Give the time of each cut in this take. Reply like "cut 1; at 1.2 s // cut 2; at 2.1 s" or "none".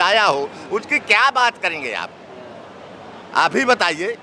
none